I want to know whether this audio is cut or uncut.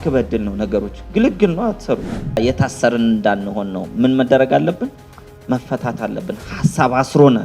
cut